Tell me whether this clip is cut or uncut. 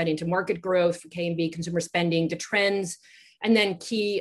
uncut